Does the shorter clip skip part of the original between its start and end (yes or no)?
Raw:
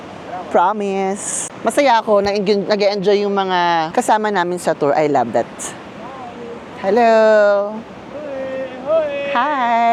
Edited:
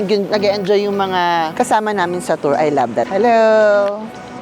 yes